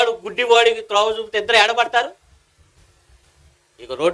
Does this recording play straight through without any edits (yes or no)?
yes